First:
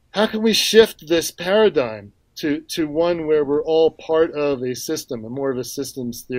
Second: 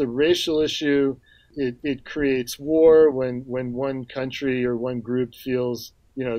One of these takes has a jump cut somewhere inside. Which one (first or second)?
second